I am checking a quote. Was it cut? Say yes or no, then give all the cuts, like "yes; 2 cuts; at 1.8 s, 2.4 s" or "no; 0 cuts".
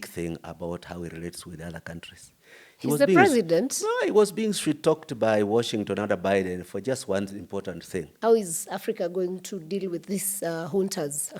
yes; 1 cut; at 8.1 s